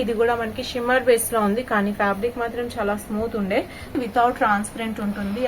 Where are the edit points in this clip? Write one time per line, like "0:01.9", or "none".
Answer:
0:03.9